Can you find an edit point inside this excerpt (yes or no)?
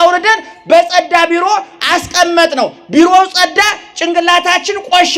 no